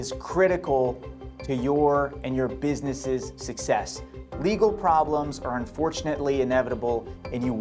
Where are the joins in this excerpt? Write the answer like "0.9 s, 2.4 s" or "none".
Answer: none